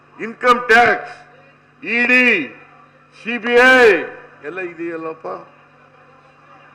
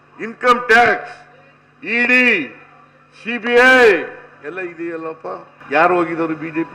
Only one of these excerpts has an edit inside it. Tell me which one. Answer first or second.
second